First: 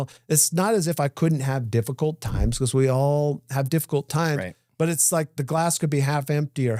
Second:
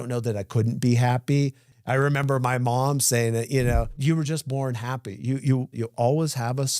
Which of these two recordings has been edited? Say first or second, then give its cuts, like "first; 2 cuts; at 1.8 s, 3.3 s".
second; 3 cuts; at 1.6 s, 3.9 s, 5.8 s